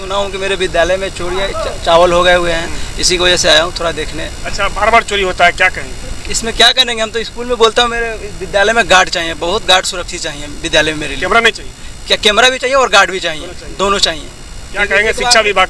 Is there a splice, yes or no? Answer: no